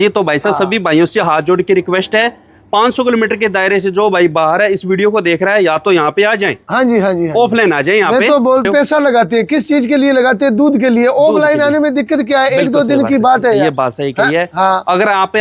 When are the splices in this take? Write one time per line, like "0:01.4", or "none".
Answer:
0:08.7